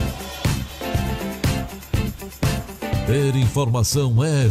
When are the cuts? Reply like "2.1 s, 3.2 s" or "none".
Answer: 3.1 s